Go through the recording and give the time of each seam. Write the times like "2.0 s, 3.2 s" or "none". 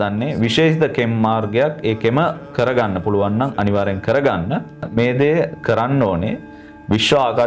none